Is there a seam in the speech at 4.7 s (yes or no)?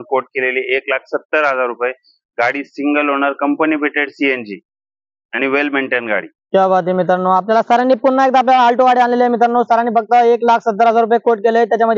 no